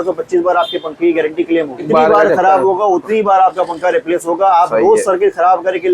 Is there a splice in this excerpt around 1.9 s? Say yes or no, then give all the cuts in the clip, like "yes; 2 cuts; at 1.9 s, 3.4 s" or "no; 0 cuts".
yes; 1 cut; at 1.9 s